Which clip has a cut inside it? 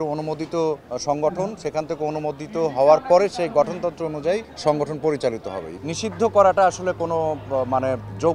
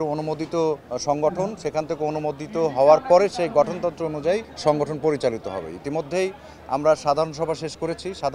first; 1 cut; at 5.8 s

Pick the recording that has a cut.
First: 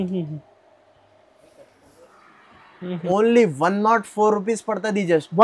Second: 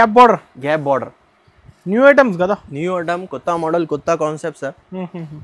first; 1 cut; at 3.0 s

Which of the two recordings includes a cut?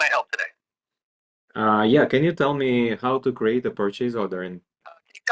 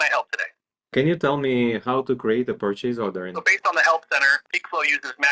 second; 3 cuts; at 0.9 s, 3.4 s, 4.4 s

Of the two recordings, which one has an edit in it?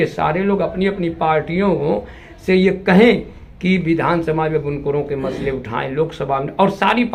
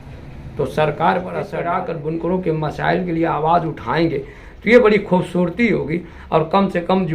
second; 1 cut; at 1.5 s

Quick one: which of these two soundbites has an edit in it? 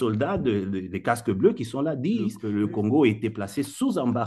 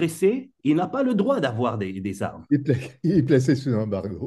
first; 1 cut; at 2.4 s

